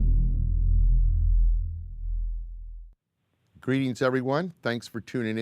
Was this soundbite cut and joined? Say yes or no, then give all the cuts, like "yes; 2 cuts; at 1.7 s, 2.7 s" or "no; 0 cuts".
yes; 1 cut; at 1.4 s